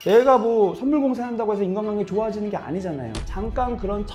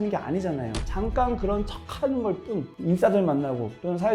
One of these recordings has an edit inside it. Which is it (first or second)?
second